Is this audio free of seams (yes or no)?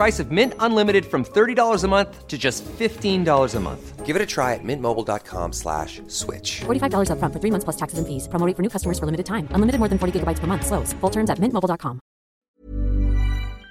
no